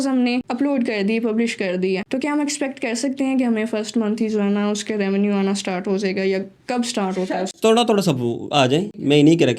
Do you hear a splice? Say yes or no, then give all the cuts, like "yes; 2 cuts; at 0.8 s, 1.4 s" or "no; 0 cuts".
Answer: no; 0 cuts